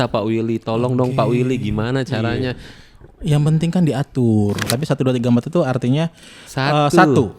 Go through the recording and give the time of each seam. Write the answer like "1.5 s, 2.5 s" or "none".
4.7 s